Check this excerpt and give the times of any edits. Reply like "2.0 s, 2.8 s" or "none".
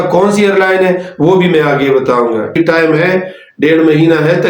2.5 s